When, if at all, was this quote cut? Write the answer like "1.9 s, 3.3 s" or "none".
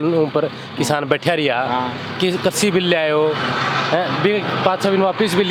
none